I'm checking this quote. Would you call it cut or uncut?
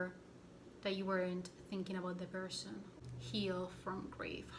cut